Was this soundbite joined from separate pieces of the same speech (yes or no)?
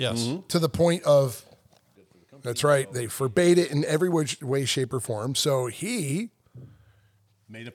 yes